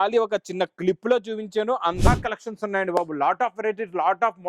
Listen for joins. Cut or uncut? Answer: cut